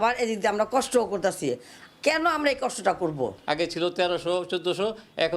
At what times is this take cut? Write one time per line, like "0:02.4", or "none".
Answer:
0:03.4